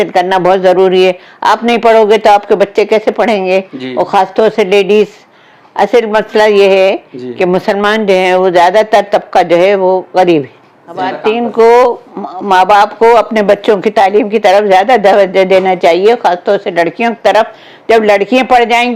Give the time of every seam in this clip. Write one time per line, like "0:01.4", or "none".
0:11.1

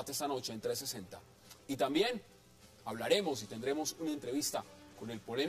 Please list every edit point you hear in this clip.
0:03.5

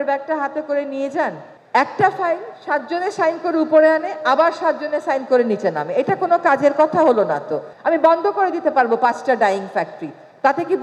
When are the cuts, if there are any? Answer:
0:01.4
0:07.7

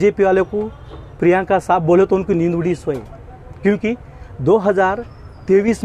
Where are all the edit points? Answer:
none

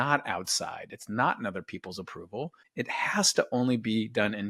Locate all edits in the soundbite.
0:02.6

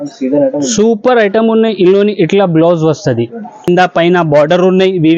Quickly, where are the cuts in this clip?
0:03.7

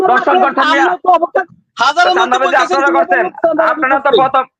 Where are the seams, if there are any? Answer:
0:01.4

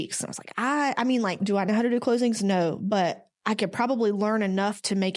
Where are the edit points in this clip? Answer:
0:01.4

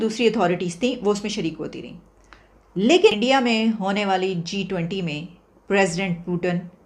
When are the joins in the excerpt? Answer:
0:03.2

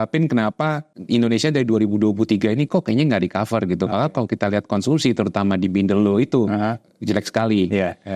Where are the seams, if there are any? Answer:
0:00.9

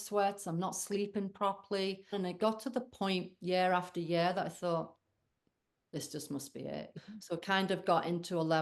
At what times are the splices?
0:02.1
0:06.9

